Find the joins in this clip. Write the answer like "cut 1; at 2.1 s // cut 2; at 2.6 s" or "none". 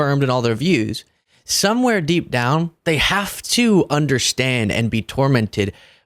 cut 1; at 2.7 s